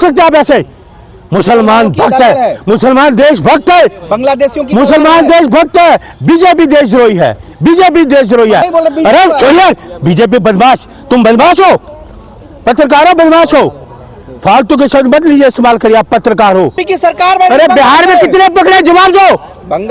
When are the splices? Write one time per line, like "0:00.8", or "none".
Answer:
0:08.7
0:16.9